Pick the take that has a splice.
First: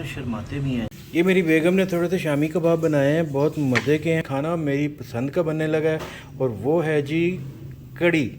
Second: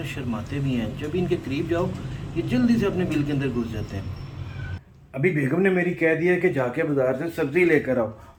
first; 2 cuts; at 1.0 s, 4.3 s

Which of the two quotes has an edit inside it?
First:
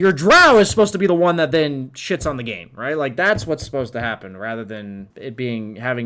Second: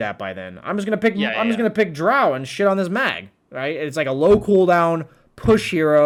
first; 1 cut; at 5.1 s

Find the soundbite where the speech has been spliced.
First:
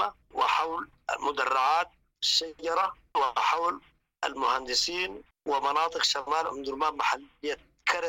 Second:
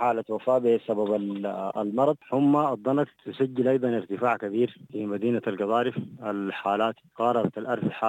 second; 4 cuts; at 2.2 s, 3.2 s, 4.9 s, 7.0 s

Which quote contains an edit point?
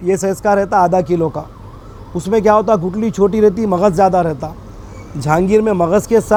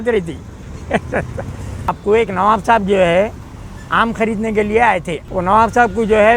second; 2 cuts; at 1.9 s, 5.2 s

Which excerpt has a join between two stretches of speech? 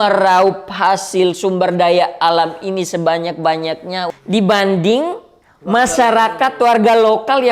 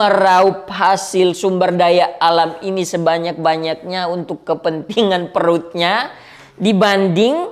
first; 2 cuts; at 4.1 s, 6.0 s

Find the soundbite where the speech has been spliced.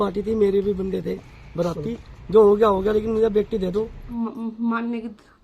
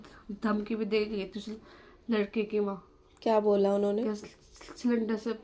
first; 1 cut; at 4.1 s

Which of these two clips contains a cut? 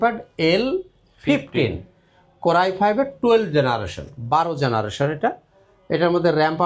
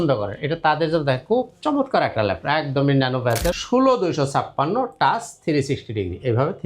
second; 1 cut; at 3.6 s

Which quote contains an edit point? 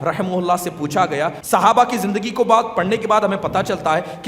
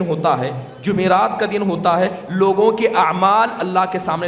first; 1 cut; at 1.4 s

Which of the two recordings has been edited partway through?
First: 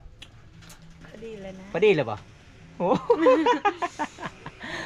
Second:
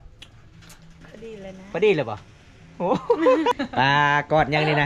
second; 1 cut; at 3.6 s

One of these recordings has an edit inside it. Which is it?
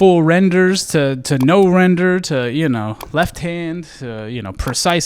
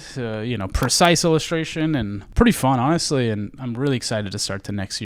second; 1 cut; at 2.2 s

